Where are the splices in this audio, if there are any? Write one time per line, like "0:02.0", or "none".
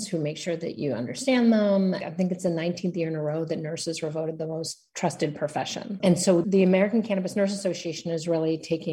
0:02.1
0:06.3